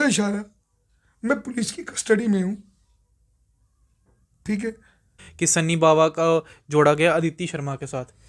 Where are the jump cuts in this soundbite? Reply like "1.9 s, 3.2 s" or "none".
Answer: 5.2 s